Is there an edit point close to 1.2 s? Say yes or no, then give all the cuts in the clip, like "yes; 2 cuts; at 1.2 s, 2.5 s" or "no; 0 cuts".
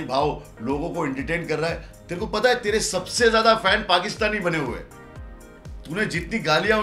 no; 0 cuts